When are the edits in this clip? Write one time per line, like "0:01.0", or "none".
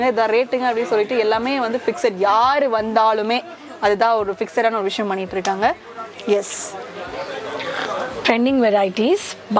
none